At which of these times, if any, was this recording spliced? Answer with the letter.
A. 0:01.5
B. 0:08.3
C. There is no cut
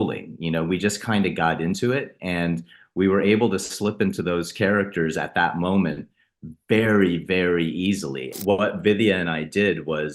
B